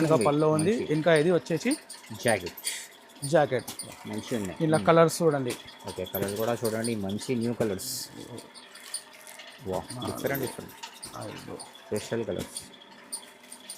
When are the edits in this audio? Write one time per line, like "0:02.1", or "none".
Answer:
none